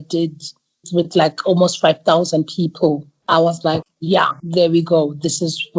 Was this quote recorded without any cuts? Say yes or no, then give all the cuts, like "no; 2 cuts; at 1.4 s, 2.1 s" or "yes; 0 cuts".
no; 2 cuts; at 3.1 s, 3.8 s